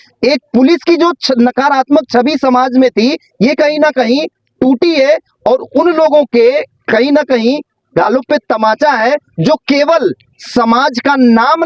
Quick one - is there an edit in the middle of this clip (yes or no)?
no